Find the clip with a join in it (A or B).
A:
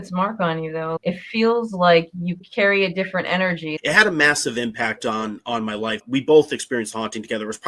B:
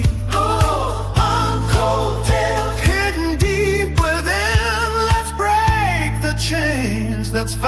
A